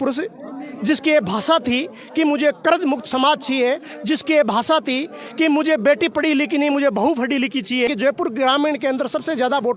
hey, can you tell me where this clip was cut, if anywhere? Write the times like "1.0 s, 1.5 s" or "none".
7.9 s